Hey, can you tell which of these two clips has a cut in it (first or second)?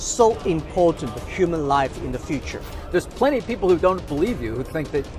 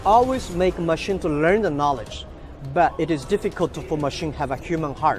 first